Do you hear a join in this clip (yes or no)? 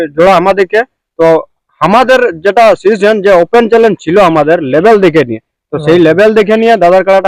no